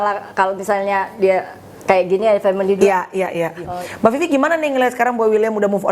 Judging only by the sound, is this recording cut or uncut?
cut